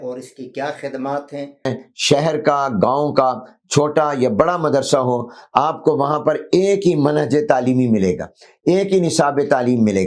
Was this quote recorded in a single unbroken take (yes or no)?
no